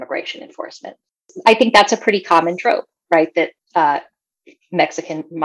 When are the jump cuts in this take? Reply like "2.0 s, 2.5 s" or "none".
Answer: 1.2 s, 3.6 s